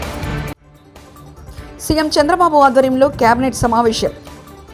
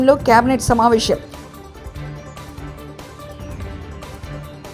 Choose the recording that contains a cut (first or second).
second